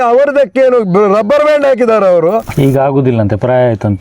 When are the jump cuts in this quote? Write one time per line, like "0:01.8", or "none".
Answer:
0:02.5